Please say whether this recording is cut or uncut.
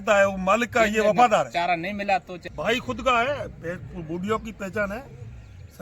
cut